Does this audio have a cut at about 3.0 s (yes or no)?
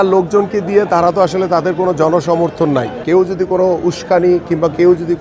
yes